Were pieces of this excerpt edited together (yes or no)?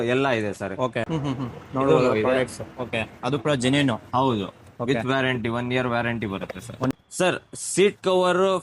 yes